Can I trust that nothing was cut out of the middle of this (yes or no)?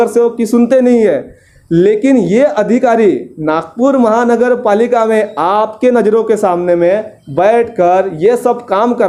yes